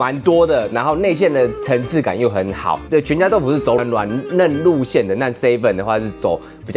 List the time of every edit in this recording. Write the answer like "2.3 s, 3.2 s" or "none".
2.8 s